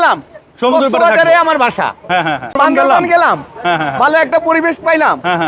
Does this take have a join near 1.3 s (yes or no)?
no